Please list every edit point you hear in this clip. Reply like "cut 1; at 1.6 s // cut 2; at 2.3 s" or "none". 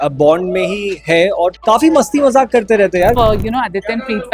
cut 1; at 1.6 s // cut 2; at 3.1 s